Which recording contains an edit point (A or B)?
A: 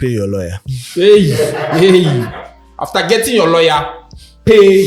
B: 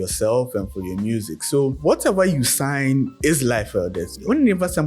B